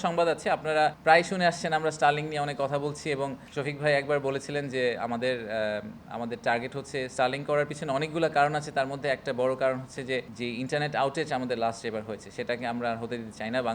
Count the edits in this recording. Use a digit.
3